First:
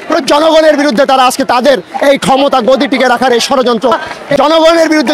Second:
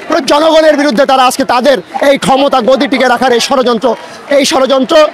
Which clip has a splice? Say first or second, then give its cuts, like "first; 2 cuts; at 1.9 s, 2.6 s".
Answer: first; 1 cut; at 4.1 s